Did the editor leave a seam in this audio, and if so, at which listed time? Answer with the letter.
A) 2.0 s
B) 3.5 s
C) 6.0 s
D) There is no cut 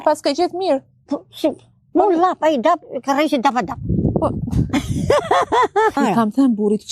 C